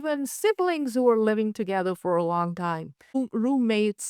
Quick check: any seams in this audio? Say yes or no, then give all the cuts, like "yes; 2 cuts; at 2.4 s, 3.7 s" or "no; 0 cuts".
yes; 1 cut; at 3.2 s